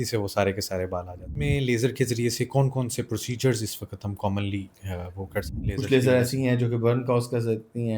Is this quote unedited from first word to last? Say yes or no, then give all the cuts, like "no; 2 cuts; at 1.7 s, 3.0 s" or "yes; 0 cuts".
no; 2 cuts; at 1.3 s, 5.5 s